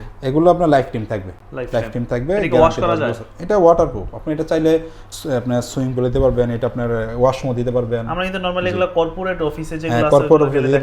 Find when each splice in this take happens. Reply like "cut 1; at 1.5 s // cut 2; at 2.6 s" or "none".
none

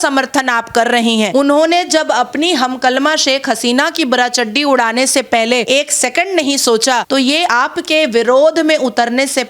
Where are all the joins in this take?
cut 1; at 1.3 s // cut 2; at 5.6 s

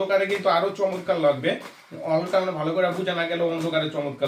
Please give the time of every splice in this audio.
none

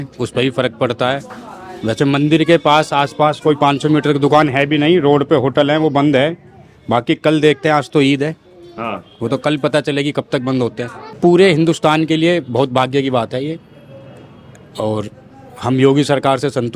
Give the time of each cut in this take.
cut 1; at 11.2 s

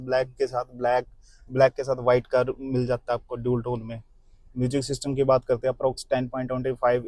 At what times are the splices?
none

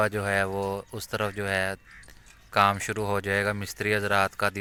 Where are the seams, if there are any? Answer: none

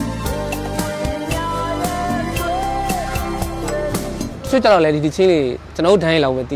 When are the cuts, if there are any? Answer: cut 1; at 4.3 s

